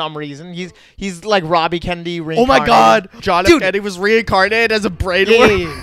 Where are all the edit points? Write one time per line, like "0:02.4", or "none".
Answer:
0:03.2